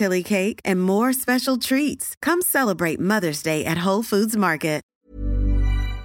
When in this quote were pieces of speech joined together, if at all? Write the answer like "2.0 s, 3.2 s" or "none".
4.9 s